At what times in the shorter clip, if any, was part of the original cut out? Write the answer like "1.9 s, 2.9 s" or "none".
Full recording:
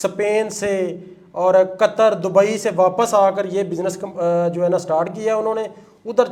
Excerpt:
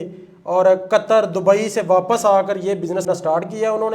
3.1 s